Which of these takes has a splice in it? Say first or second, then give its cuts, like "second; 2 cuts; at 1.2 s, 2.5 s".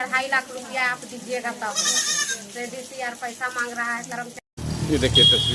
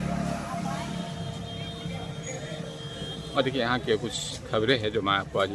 first; 1 cut; at 4.3 s